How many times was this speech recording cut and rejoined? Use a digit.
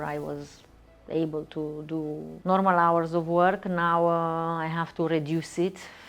1